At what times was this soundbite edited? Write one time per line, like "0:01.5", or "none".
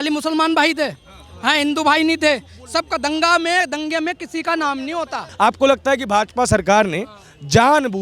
0:05.3